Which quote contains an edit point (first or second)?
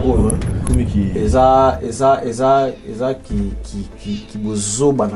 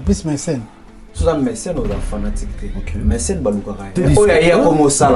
second